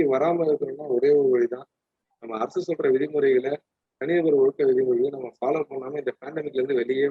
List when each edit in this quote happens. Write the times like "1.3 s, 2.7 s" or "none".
none